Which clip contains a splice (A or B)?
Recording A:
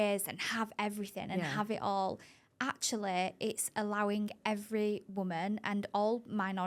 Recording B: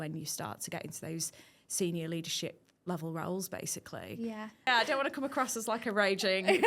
B